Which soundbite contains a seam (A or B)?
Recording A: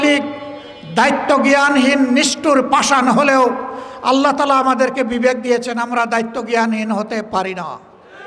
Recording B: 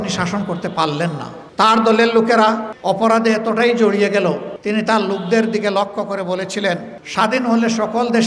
B